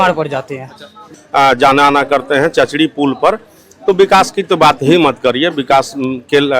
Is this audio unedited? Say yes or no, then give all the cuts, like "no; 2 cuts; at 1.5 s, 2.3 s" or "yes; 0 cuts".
no; 1 cut; at 1.0 s